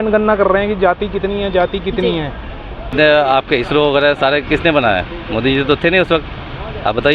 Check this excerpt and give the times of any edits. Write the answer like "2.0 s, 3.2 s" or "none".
2.9 s